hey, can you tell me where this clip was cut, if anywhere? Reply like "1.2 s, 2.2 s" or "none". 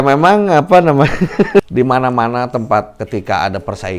1.7 s, 3.0 s

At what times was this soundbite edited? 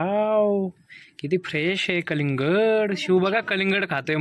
none

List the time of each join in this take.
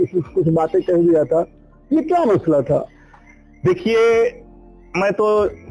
none

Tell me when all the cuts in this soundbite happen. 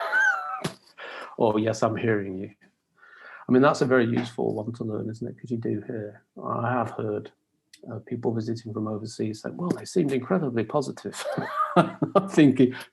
none

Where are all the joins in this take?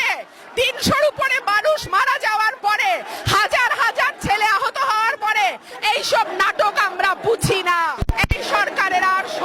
8.0 s

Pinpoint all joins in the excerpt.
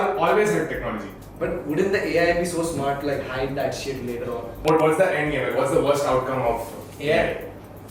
1.1 s, 4.6 s

